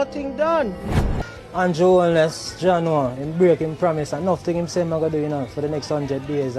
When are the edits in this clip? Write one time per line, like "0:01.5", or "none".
0:01.2